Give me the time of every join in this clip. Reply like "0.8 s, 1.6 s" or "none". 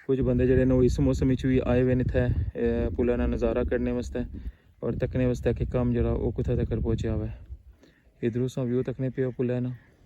none